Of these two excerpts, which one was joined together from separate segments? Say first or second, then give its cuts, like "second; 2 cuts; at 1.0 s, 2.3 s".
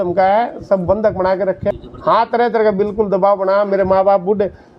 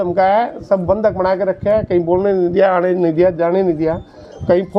first; 1 cut; at 1.7 s